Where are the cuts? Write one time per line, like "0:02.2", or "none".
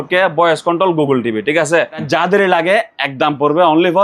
0:02.0